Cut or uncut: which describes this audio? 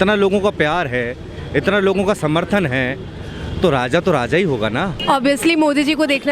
cut